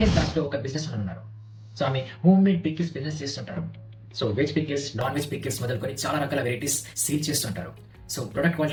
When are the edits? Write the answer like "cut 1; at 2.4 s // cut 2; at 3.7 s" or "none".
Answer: none